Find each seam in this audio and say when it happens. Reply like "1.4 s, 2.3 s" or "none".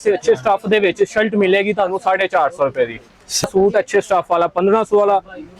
3.4 s